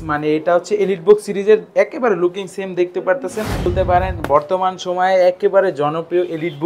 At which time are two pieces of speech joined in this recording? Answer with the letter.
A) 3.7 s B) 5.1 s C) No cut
A